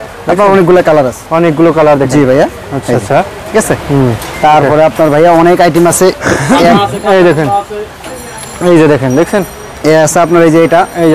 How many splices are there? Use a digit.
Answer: 0